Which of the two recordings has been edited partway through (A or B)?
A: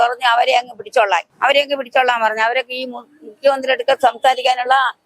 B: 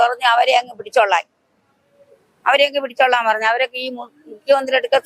A